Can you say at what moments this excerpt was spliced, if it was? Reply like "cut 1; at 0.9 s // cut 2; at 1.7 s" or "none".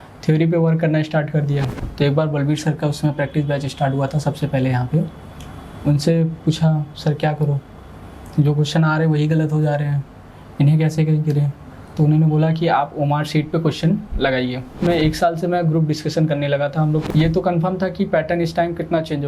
cut 1; at 1.8 s // cut 2; at 14.7 s // cut 3; at 17.1 s